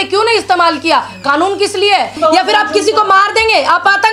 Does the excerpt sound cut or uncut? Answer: cut